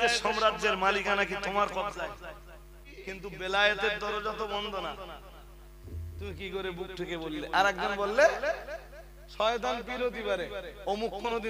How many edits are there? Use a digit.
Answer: 1